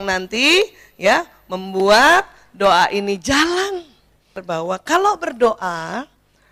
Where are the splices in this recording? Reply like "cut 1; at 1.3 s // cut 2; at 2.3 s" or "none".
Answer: cut 1; at 4.4 s